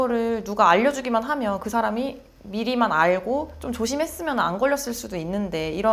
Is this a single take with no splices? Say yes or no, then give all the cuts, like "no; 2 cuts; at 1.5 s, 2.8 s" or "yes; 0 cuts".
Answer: yes; 0 cuts